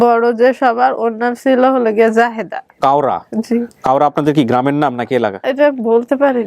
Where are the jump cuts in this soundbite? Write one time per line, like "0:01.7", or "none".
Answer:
0:02.6